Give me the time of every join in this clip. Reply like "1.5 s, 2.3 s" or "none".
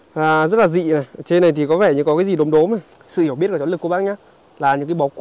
3.0 s